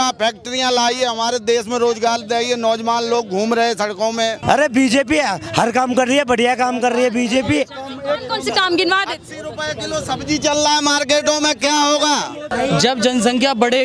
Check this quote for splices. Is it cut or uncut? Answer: cut